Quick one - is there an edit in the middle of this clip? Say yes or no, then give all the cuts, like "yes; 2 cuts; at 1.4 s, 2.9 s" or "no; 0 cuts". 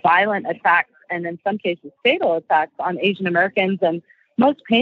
no; 0 cuts